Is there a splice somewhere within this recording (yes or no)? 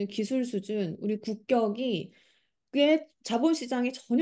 no